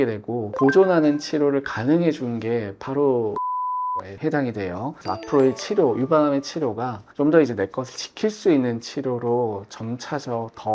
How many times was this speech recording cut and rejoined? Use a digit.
2